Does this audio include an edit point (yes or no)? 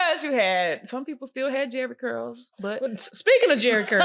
no